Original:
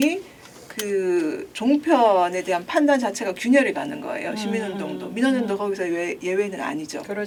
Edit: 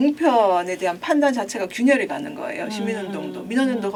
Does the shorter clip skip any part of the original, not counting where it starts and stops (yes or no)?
no